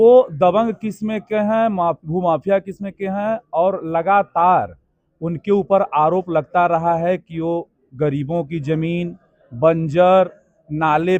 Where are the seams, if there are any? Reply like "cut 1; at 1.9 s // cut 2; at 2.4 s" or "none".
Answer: none